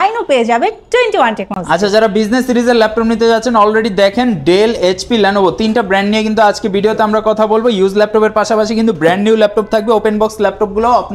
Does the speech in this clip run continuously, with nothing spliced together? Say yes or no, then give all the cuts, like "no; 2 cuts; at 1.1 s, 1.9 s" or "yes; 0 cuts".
yes; 0 cuts